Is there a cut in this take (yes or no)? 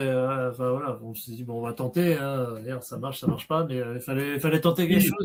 no